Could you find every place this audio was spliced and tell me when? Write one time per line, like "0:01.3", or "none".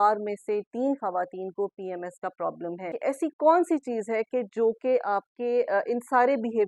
0:02.9